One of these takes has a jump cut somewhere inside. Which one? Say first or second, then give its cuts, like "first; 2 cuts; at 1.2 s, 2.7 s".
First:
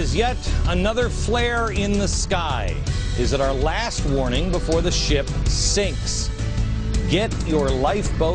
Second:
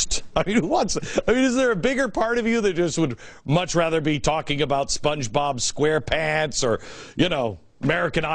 second; 1 cut; at 2.4 s